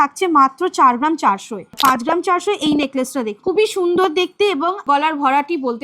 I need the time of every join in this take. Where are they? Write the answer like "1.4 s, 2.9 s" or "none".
1.7 s, 3.3 s, 4.8 s